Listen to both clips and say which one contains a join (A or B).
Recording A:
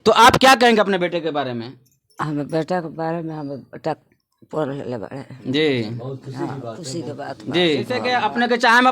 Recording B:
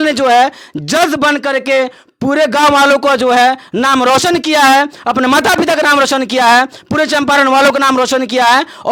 A